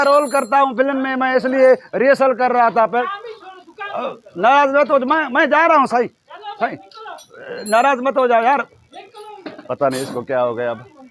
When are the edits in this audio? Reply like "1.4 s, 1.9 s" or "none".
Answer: 2.9 s